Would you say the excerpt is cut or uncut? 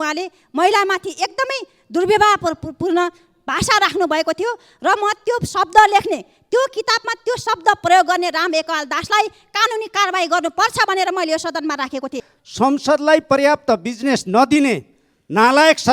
cut